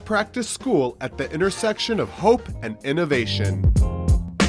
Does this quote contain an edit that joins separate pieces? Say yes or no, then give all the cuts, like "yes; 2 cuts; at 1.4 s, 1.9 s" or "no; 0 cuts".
yes; 1 cut; at 3.6 s